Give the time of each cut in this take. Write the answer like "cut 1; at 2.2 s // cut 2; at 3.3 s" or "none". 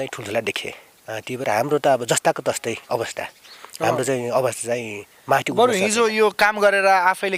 none